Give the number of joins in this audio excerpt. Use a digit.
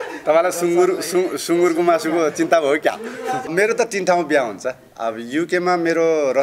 1